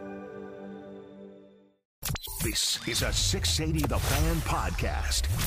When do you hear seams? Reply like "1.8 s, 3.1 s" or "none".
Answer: 2.1 s